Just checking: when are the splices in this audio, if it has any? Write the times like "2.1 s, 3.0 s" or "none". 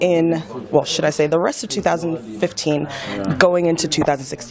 1.3 s